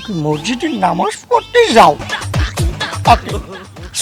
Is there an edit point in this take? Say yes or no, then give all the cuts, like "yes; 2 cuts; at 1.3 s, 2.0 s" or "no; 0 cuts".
no; 0 cuts